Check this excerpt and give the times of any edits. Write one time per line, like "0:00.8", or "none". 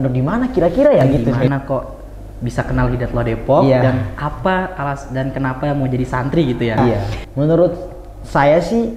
0:01.4
0:07.2